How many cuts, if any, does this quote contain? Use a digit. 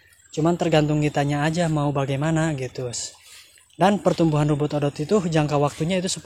0